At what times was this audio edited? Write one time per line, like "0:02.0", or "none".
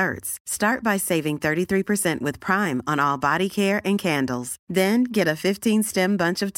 none